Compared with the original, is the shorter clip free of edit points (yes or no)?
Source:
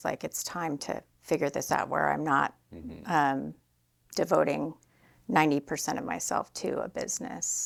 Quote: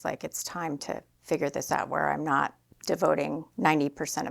no